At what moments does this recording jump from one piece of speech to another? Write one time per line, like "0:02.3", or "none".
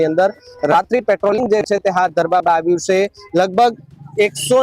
none